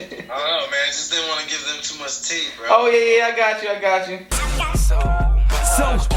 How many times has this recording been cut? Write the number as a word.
one